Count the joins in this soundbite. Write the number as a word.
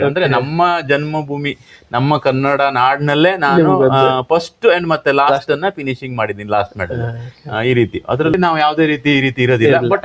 one